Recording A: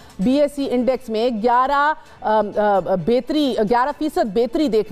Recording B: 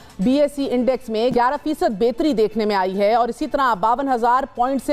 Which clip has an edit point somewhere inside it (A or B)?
B